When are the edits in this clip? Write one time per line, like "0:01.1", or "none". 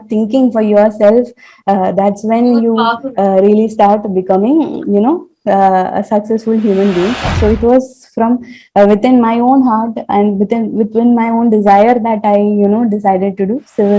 0:07.3